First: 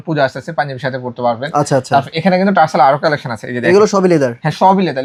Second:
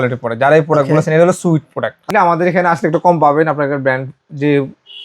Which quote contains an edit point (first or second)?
second